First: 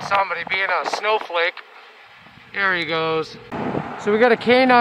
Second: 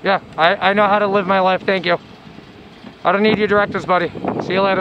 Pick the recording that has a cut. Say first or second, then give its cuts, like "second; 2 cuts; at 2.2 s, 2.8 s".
first; 1 cut; at 3.5 s